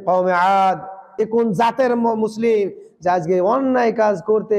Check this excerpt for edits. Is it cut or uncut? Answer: cut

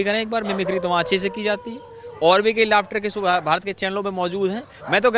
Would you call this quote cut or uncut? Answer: uncut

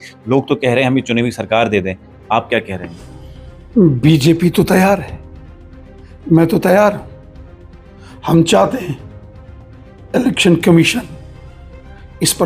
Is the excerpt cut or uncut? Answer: uncut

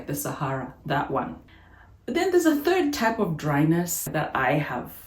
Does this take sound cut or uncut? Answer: cut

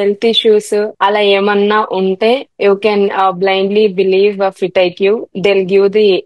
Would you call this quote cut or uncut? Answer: cut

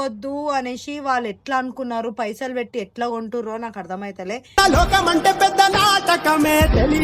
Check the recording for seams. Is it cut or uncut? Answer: uncut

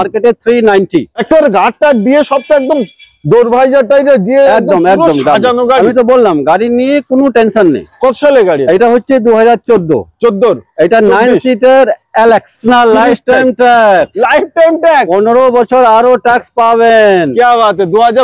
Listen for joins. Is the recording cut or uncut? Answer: cut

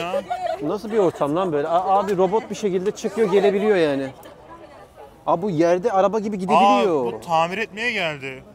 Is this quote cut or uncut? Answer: uncut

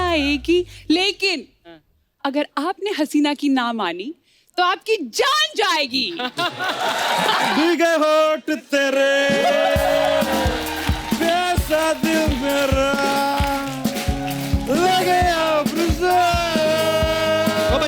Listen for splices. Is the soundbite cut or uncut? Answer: cut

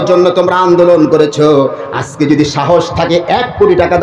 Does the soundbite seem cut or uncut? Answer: uncut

